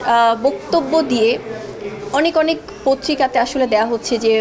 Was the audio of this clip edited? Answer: no; 0 cuts

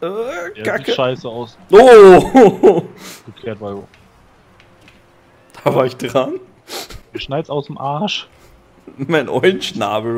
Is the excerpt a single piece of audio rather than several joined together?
yes; 0 cuts

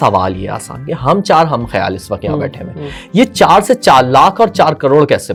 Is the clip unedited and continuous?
yes; 0 cuts

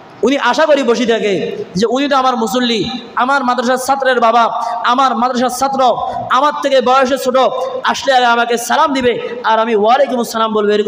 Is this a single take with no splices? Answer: yes; 0 cuts

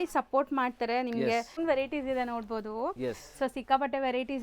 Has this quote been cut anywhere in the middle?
yes; 1 cut; at 1.6 s

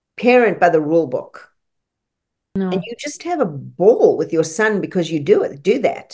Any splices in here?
yes; 1 cut; at 2.6 s

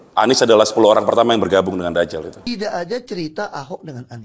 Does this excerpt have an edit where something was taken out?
yes; 1 cut; at 2.1 s

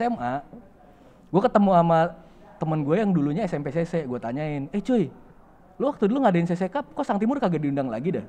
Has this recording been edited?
no; 0 cuts

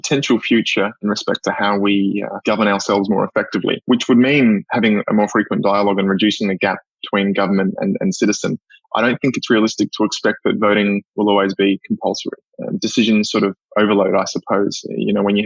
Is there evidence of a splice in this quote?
yes; 3 cuts; at 1.0 s, 2.3 s, 3.8 s

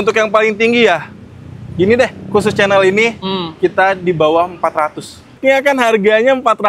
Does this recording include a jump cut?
yes; 1 cut; at 5.4 s

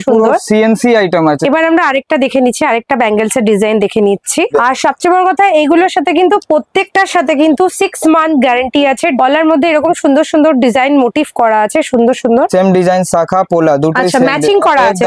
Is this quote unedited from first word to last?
no; 4 cuts; at 1.4 s, 4.5 s, 9.1 s, 12.5 s

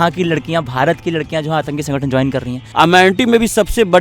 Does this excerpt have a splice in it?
yes; 1 cut; at 2.6 s

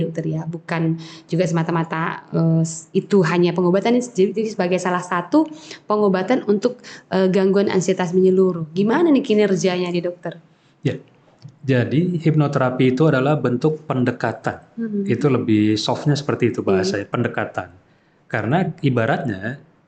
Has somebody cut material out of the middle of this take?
no; 0 cuts

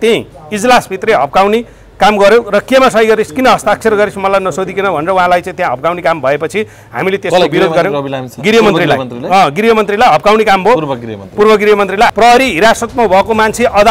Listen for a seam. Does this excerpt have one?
yes; 1 cut; at 12.1 s

